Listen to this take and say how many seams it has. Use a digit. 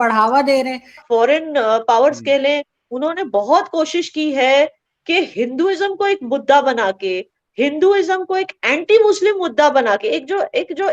1